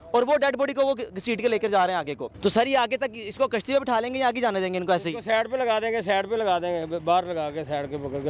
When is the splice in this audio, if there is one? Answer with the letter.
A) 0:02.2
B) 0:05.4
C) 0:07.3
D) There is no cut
A